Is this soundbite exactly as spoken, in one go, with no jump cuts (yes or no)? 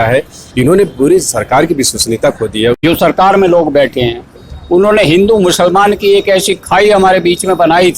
no